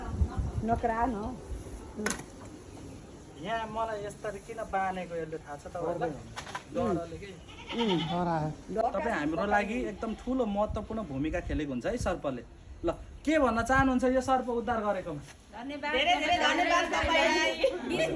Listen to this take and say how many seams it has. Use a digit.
1